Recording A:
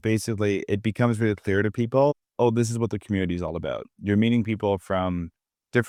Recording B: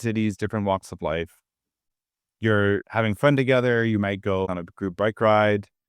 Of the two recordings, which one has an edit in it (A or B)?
B